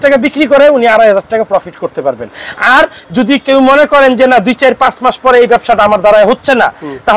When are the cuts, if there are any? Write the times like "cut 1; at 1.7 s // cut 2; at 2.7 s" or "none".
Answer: none